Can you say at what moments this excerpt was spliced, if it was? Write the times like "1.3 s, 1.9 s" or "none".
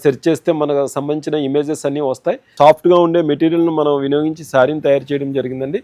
2.5 s